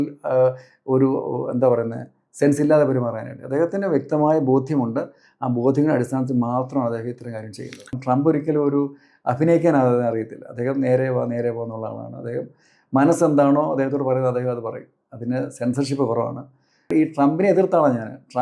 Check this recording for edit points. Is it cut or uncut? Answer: cut